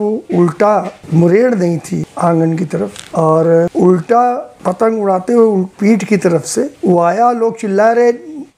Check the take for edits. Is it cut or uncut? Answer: cut